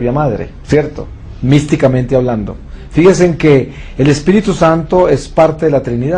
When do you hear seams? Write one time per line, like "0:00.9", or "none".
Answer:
0:01.4

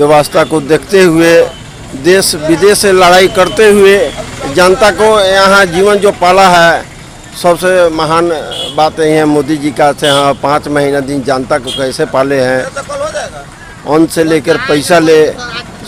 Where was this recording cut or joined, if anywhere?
none

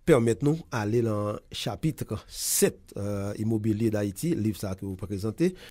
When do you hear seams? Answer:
none

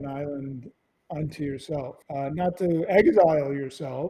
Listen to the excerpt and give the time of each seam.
0:02.0

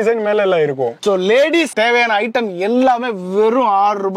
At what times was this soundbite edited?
0:01.0

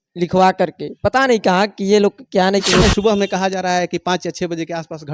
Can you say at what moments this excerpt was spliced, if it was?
0:02.8

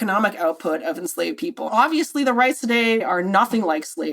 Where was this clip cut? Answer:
0:01.7
0:03.0

